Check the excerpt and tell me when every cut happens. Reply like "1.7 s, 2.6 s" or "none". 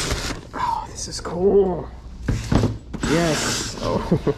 none